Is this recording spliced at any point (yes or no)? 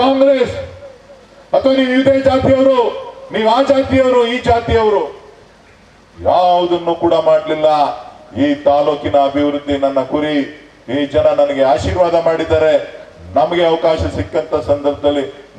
no